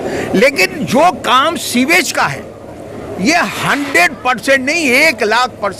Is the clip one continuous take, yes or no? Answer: yes